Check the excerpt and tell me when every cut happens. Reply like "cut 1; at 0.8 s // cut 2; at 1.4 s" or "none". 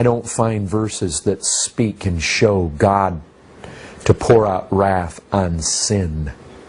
cut 1; at 4.9 s